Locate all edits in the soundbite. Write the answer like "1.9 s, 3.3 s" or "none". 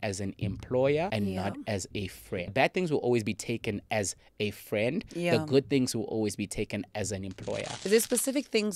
1.1 s, 2.5 s, 7.7 s